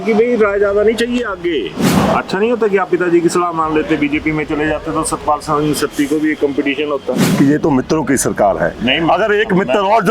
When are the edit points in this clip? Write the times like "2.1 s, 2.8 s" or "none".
1.8 s, 7.2 s